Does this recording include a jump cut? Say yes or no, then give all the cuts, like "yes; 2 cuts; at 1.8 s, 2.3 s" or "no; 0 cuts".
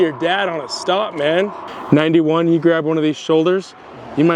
yes; 1 cut; at 1.6 s